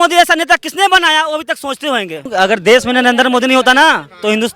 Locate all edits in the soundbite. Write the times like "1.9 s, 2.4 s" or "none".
2.3 s